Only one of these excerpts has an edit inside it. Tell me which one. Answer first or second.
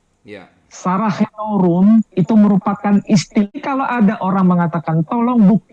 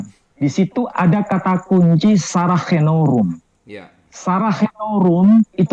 first